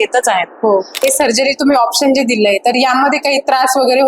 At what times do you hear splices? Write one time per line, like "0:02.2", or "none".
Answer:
0:00.9